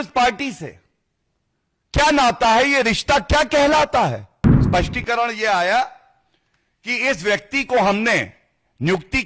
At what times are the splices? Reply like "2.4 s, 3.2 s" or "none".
4.6 s